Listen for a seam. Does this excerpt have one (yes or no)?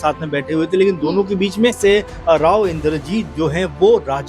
yes